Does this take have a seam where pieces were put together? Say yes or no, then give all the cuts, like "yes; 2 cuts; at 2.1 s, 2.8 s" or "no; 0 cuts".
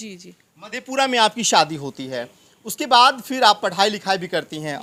no; 0 cuts